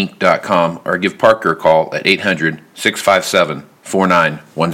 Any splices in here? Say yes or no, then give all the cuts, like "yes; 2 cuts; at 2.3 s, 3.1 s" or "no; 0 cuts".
no; 0 cuts